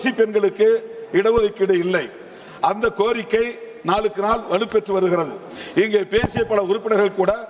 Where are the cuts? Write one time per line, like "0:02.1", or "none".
none